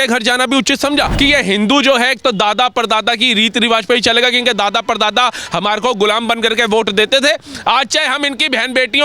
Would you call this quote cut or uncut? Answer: cut